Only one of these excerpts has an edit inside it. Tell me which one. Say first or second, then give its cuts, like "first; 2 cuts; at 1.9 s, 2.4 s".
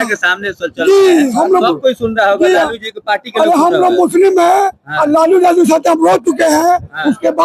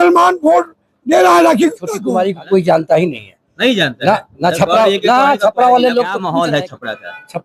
second; 2 cuts; at 1.9 s, 6.2 s